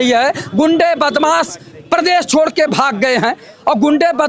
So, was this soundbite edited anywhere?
no; 0 cuts

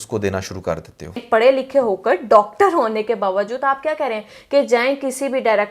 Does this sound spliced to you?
yes; 1 cut; at 1.2 s

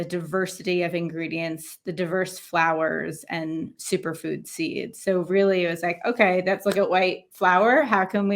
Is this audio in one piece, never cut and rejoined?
yes; 0 cuts

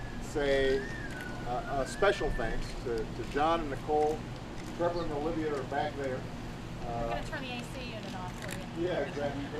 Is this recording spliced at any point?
no; 0 cuts

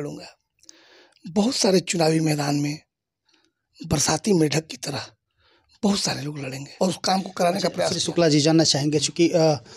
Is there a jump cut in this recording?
yes; 1 cut; at 6.6 s

